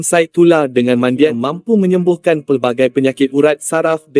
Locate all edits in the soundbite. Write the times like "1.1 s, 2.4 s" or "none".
1.4 s